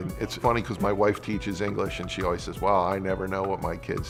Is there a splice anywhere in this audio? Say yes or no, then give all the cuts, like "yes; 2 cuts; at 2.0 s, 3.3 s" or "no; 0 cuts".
no; 0 cuts